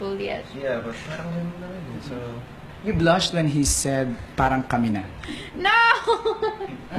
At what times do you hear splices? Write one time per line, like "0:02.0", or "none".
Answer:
0:01.8